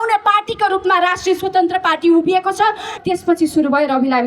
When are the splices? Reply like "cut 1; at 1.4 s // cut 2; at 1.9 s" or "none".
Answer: cut 1; at 2.9 s